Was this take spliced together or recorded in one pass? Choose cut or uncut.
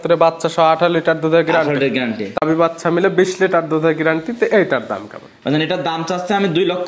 cut